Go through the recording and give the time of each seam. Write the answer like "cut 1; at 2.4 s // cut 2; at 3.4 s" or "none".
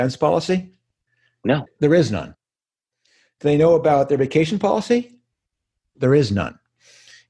cut 1; at 1.5 s